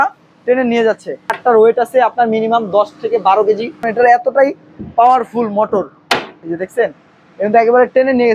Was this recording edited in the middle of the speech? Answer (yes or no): yes